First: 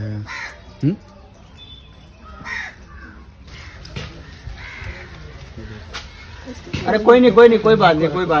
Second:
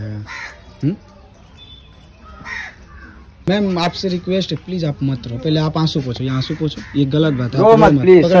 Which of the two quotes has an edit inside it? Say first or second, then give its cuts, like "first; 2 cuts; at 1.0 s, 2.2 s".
first; 1 cut; at 3.4 s